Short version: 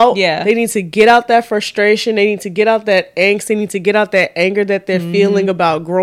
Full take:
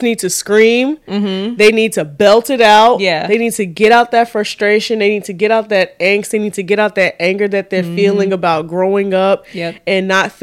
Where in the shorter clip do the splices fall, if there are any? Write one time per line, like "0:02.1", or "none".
none